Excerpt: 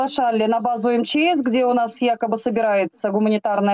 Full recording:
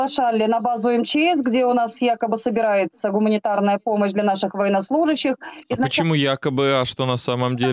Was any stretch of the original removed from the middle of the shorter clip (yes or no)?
no